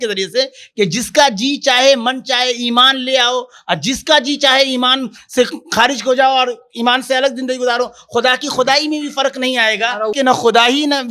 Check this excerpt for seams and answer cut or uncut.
cut